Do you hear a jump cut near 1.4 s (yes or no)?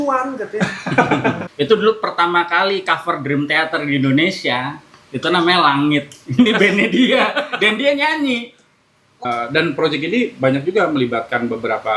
yes